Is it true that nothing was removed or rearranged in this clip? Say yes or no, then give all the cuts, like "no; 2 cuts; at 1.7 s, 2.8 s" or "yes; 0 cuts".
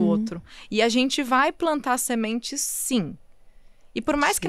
yes; 0 cuts